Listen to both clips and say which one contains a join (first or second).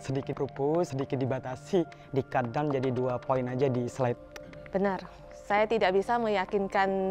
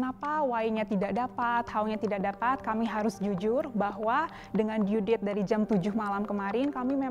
first